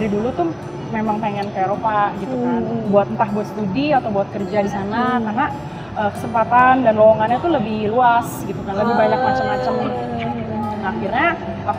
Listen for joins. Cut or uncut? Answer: uncut